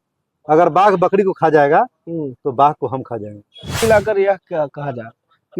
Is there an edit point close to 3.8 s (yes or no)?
yes